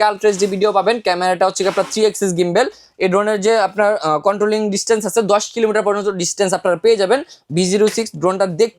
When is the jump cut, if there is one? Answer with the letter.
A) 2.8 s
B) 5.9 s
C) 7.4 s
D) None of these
C